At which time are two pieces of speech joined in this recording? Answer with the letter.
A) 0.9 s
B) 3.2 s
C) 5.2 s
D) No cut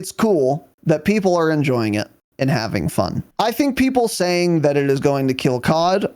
B